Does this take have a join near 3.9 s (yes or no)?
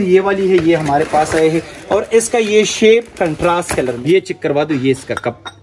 yes